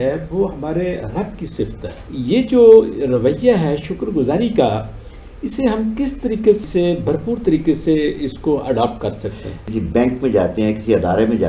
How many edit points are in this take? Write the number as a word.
two